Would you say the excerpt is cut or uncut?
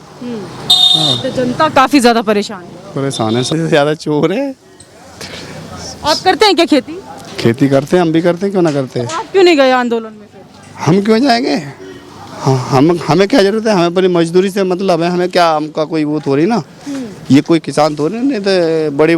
cut